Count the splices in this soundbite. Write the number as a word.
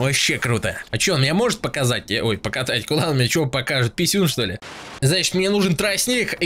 one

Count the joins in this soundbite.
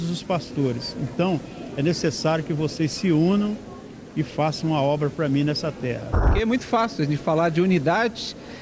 one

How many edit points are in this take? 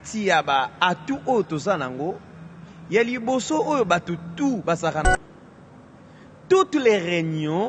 one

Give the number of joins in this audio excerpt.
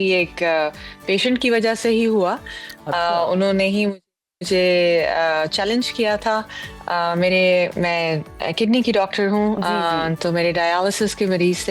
zero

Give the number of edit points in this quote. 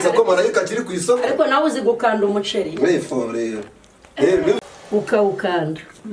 one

